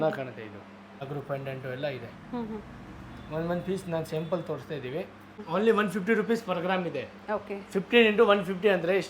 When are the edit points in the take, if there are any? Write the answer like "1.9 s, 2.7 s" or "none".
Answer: 1.0 s, 5.4 s